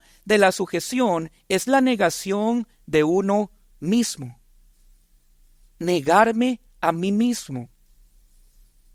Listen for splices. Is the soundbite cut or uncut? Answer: uncut